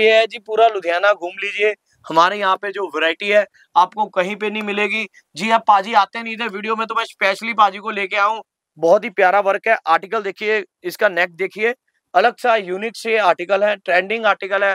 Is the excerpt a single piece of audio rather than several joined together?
no; 1 cut; at 8.5 s

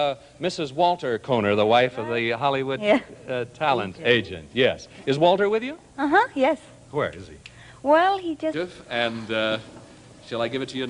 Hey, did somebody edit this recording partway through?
no; 0 cuts

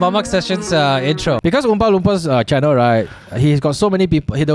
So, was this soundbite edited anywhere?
yes; 1 cut; at 1.4 s

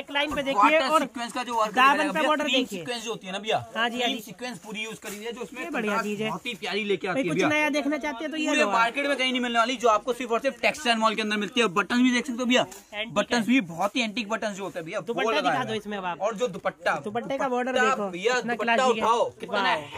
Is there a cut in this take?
no; 0 cuts

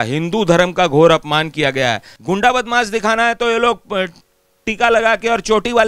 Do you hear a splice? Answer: yes; 1 cut; at 2.1 s

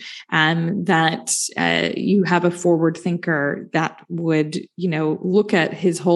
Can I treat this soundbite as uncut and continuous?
yes; 0 cuts

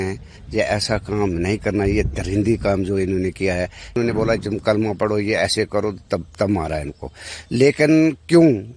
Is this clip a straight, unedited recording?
no; 1 cut; at 4.0 s

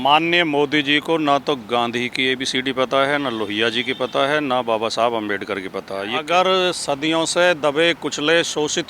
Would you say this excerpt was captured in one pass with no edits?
no; 1 cut; at 6.1 s

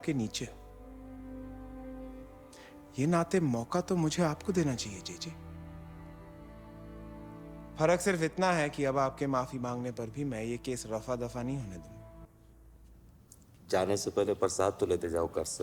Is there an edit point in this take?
yes; 1 cut; at 12.2 s

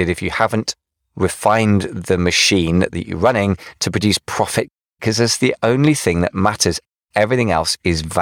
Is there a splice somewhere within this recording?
yes; 2 cuts; at 4.8 s, 6.9 s

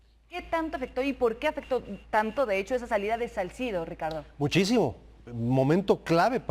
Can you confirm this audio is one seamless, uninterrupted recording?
yes; 0 cuts

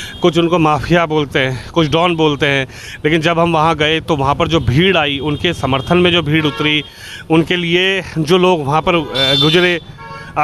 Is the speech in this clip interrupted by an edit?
no; 0 cuts

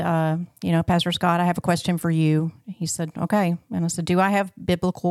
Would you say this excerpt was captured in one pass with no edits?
yes; 0 cuts

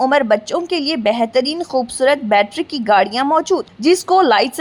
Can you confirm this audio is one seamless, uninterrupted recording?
yes; 0 cuts

